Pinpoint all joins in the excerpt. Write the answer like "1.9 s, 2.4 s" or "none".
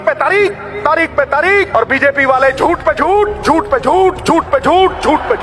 1.7 s